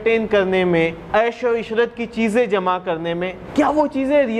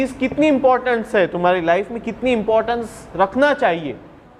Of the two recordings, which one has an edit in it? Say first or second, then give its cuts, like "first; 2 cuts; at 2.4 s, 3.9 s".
first; 2 cuts; at 1.0 s, 3.4 s